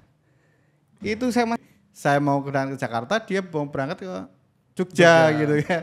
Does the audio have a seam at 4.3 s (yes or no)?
no